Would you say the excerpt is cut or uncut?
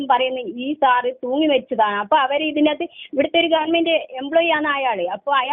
uncut